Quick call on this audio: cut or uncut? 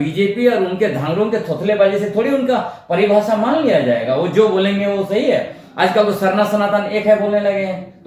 uncut